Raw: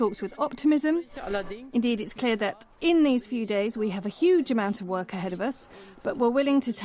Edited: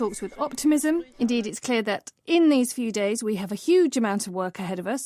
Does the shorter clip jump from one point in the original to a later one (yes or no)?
yes